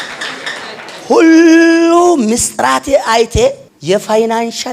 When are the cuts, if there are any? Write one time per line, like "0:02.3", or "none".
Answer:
0:03.7